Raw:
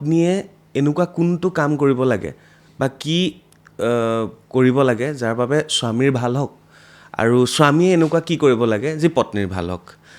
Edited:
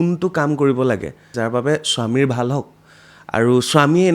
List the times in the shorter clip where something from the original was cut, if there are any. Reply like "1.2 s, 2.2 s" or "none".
1.3 s